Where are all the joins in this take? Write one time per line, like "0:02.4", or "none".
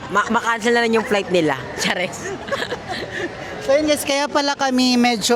none